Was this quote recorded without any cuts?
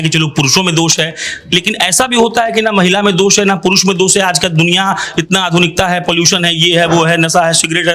yes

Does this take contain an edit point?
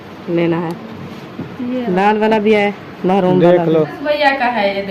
yes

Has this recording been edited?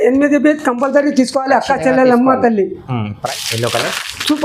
yes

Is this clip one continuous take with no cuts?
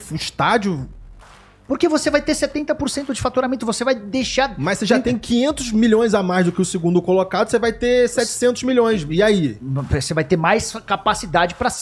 yes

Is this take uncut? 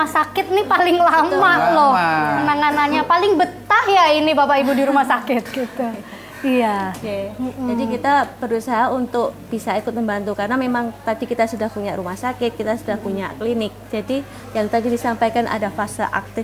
yes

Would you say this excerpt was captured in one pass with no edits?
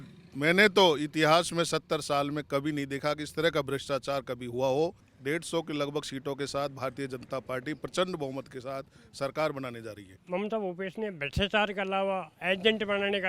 no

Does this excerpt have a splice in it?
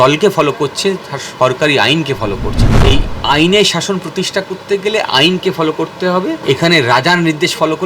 yes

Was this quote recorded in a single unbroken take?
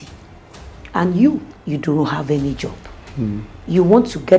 no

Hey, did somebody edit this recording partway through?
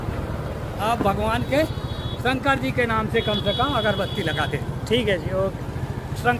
no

